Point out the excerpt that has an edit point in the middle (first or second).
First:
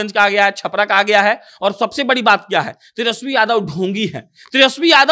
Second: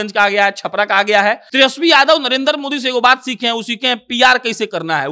second